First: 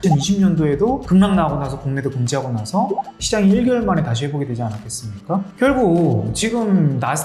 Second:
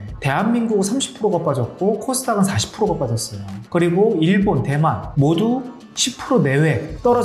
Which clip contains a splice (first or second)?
first